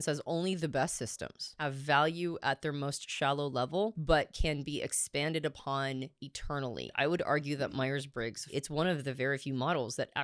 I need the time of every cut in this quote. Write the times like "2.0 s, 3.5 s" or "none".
1.5 s, 4.0 s, 6.9 s, 8.5 s